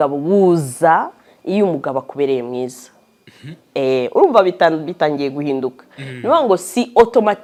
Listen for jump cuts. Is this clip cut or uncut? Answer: uncut